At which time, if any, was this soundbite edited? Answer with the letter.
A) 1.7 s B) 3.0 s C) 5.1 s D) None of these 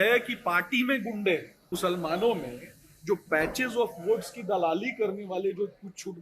A